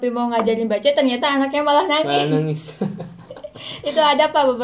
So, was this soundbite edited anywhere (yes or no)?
no